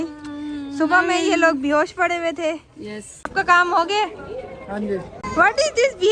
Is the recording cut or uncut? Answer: cut